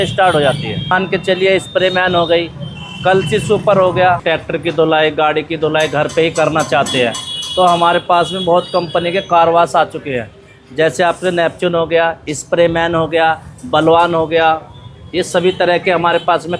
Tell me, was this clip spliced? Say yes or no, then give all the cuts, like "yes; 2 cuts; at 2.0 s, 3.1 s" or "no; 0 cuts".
yes; 2 cuts; at 0.9 s, 4.2 s